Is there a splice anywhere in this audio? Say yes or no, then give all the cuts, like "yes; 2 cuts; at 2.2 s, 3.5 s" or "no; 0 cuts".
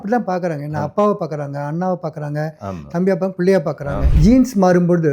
yes; 1 cut; at 4.0 s